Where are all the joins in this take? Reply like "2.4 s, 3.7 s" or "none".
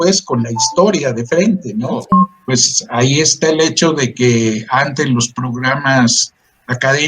2.1 s